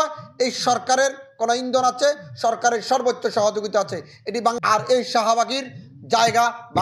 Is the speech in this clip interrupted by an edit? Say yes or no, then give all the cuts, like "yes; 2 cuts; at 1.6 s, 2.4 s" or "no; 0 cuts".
yes; 1 cut; at 4.6 s